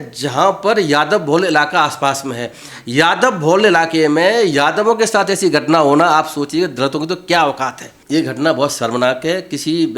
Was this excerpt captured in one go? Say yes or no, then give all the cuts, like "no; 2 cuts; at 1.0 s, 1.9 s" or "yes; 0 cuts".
no; 1 cut; at 7.9 s